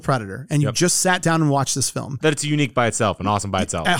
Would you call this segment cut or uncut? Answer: cut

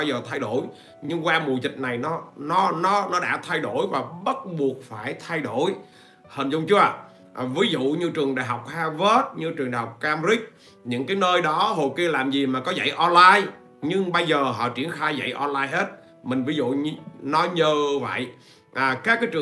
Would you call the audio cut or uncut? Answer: uncut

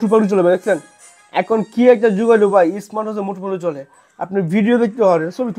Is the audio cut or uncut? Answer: uncut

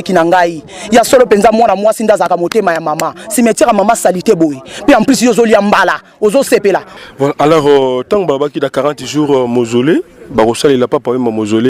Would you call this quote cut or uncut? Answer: cut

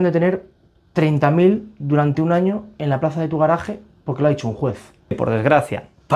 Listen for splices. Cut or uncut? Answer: cut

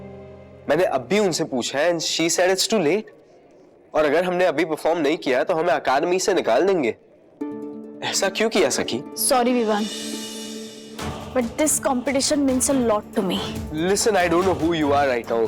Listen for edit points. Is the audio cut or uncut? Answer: uncut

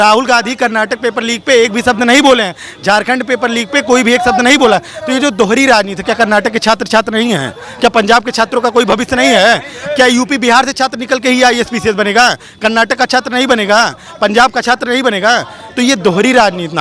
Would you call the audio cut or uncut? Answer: uncut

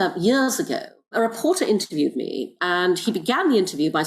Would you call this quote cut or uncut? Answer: cut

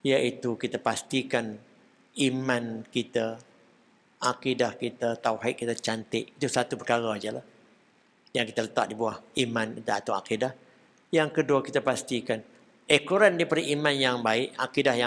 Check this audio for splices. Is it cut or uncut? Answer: uncut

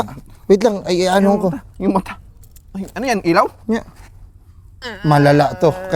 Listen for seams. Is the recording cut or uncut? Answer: uncut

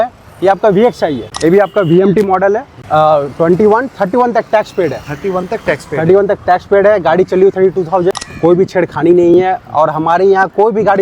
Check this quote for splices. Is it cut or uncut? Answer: cut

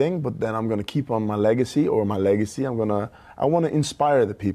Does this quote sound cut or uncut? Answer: uncut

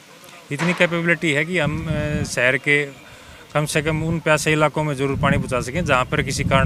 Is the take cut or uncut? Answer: uncut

